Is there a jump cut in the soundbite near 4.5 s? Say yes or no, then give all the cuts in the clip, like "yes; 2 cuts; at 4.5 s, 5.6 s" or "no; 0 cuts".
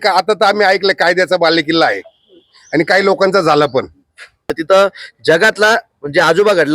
yes; 1 cut; at 4.5 s